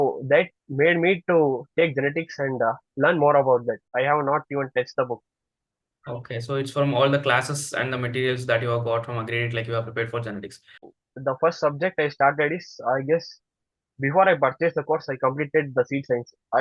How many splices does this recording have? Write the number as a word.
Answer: two